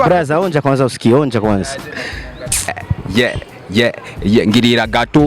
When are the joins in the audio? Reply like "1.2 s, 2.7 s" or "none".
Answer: 2.8 s